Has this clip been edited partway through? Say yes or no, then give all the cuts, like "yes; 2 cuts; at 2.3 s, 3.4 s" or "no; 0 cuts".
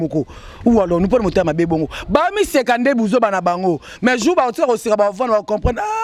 no; 0 cuts